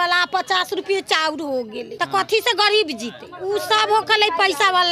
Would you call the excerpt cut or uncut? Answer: cut